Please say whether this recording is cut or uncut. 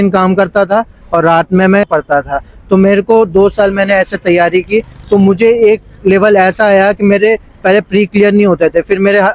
cut